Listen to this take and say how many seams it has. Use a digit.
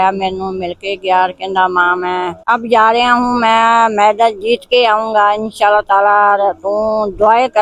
1